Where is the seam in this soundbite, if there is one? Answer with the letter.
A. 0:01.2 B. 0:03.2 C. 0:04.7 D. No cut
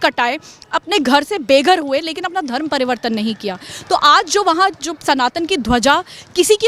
D